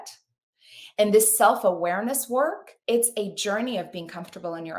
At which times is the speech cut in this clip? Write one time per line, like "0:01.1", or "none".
0:02.7